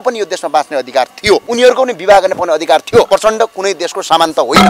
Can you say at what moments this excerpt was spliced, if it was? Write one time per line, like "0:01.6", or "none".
0:01.5
0:03.1